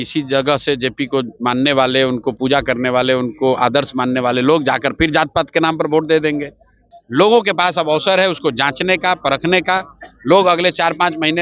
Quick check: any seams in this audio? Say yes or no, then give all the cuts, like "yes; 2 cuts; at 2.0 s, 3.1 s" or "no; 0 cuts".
yes; 1 cut; at 6.7 s